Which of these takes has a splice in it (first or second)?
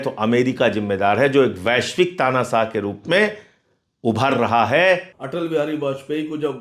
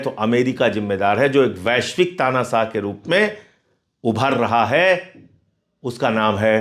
first